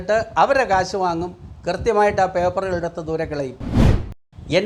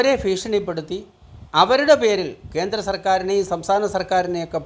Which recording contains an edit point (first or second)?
first